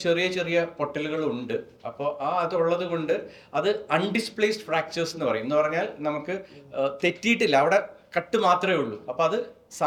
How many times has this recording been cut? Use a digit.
0